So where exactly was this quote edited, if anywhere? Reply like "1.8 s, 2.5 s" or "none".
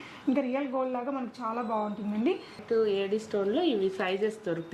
2.6 s